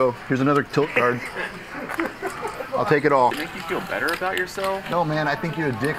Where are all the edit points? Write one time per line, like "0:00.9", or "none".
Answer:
0:03.4